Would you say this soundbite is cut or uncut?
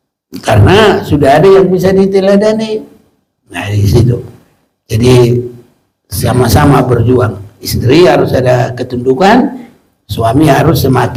uncut